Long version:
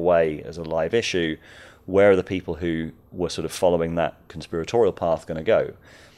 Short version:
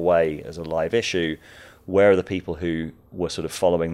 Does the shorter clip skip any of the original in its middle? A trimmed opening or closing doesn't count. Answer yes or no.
no